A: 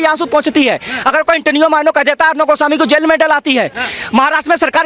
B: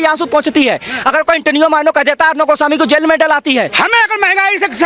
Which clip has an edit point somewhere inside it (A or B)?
B